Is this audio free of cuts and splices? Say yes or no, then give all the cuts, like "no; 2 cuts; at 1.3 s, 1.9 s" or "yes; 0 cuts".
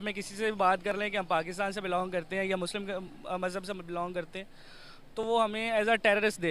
yes; 0 cuts